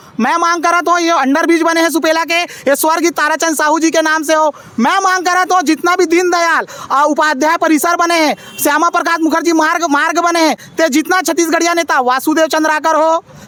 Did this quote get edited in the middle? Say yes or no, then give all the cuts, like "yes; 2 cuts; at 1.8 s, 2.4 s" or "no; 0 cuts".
no; 0 cuts